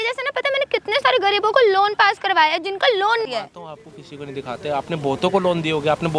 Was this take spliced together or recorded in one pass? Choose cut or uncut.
cut